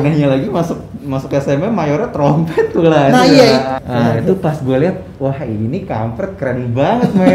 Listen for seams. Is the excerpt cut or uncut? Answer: cut